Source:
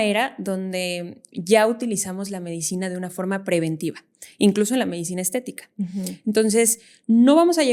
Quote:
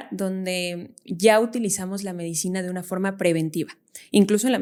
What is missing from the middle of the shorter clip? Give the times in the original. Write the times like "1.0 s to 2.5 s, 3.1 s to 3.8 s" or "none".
none